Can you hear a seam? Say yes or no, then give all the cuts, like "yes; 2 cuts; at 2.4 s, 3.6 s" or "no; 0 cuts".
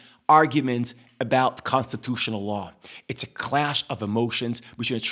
no; 0 cuts